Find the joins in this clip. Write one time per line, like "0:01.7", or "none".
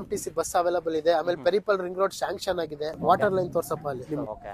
0:03.0